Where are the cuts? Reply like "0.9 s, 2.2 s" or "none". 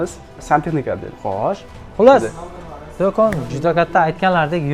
1.7 s